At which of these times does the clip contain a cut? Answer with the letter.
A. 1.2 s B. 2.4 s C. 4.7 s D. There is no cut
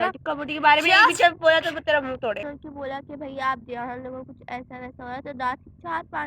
B